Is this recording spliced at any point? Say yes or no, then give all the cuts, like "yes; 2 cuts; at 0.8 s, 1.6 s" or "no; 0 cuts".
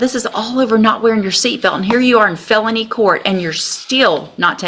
no; 0 cuts